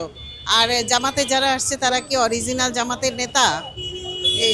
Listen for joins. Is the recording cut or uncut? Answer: uncut